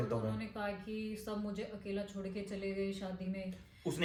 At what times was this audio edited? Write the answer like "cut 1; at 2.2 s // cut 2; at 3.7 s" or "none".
none